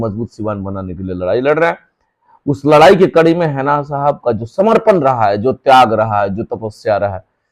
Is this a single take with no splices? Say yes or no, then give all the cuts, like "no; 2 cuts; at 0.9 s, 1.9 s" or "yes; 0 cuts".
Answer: yes; 0 cuts